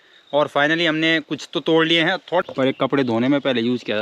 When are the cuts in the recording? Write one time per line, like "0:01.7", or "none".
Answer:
0:02.4